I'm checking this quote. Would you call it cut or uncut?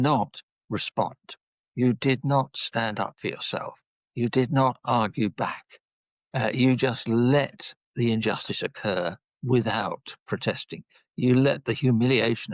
uncut